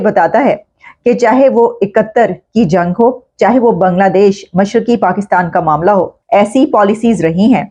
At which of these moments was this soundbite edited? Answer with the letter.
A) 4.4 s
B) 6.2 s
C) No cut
B